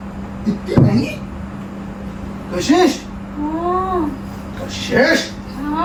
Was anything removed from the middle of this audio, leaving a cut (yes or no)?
no